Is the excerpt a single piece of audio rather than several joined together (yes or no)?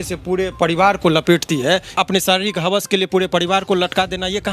no